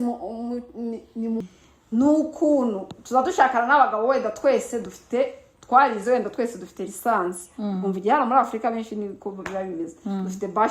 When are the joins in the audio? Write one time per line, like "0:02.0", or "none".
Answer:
0:01.4